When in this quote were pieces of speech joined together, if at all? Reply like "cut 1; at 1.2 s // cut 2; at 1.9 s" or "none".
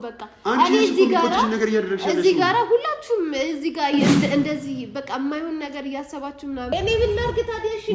cut 1; at 6.7 s